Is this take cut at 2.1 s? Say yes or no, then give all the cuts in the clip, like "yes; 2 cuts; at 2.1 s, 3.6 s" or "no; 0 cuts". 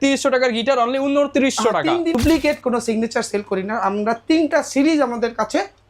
yes; 1 cut; at 2.1 s